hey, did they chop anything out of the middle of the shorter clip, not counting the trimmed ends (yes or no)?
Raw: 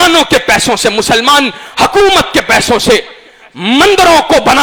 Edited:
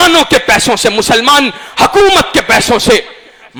no